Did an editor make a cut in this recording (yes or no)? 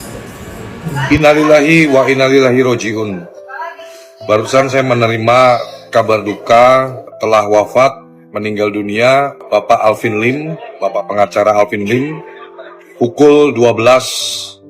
yes